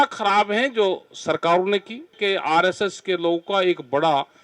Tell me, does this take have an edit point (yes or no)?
yes